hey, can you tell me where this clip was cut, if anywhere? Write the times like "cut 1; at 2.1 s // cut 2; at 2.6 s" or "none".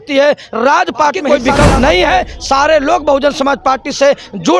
cut 1; at 1.2 s